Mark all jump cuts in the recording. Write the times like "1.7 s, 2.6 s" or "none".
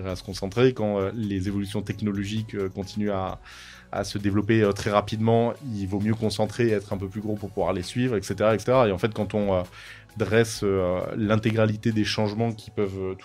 3.9 s